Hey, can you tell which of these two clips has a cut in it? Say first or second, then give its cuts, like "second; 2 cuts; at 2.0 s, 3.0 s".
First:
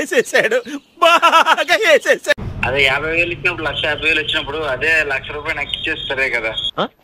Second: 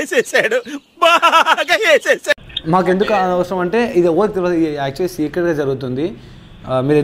first; 1 cut; at 2.5 s